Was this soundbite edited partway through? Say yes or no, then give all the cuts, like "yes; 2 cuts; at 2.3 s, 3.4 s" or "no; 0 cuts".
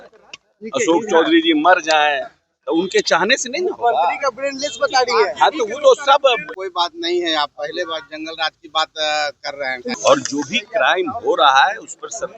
yes; 2 cuts; at 6.5 s, 9.8 s